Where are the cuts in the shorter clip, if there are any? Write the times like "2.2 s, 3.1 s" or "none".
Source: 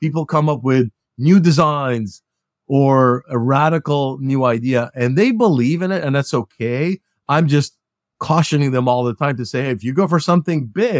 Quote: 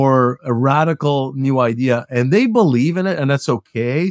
none